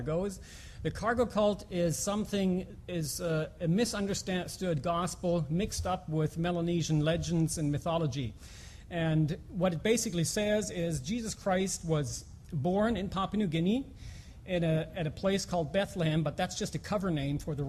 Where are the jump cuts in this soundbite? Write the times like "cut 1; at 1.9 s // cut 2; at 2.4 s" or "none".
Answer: none